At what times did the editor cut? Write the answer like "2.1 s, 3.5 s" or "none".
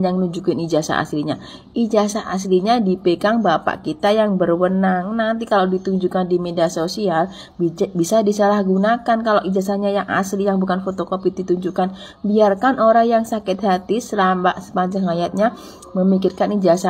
none